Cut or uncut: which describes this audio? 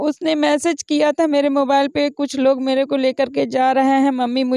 uncut